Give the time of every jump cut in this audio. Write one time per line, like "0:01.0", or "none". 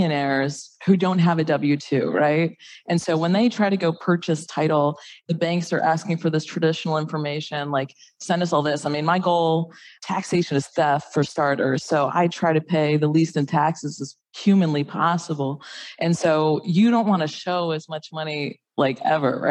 0:05.2